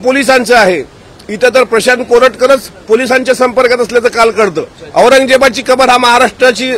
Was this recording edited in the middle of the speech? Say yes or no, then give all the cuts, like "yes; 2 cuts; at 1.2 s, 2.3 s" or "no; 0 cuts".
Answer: yes; 1 cut; at 4.7 s